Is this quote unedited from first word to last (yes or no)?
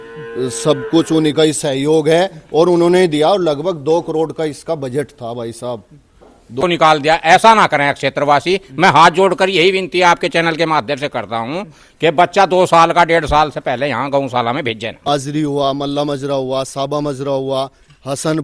no